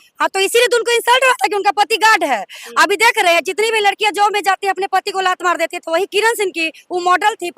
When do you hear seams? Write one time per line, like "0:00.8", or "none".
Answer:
none